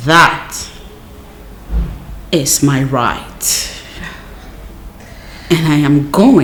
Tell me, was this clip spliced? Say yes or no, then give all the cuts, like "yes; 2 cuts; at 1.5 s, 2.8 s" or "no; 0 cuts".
no; 0 cuts